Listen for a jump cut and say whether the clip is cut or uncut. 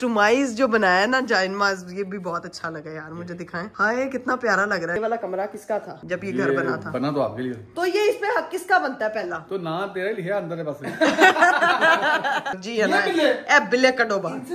cut